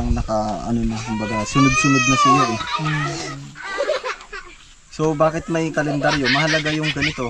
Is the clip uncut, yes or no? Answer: no